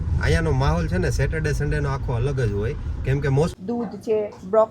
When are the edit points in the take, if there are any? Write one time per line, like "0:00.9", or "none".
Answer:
0:03.5